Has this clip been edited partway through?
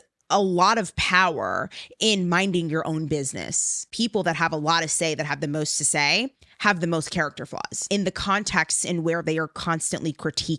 yes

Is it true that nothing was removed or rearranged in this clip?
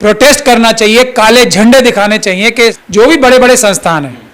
no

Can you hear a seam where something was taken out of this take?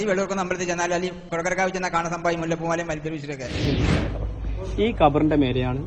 yes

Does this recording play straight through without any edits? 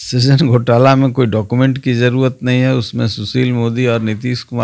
yes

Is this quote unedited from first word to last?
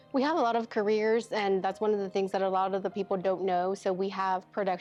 yes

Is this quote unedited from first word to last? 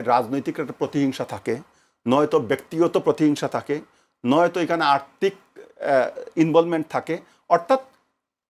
yes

